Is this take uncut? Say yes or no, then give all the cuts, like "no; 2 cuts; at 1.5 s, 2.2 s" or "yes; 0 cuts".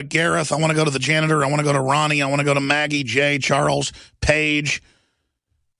yes; 0 cuts